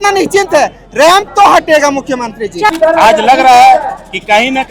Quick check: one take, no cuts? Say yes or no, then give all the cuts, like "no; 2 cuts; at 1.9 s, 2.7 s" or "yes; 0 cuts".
no; 1 cut; at 2.7 s